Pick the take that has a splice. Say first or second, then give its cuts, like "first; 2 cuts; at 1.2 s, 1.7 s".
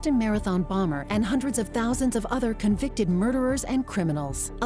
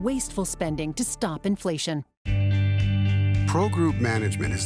second; 1 cut; at 2.1 s